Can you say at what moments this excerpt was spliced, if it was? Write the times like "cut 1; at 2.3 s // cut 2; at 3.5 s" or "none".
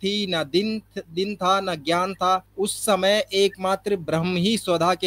cut 1; at 2.5 s